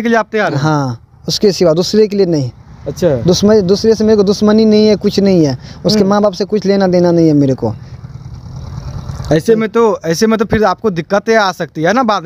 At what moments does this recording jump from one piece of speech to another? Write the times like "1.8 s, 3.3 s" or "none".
none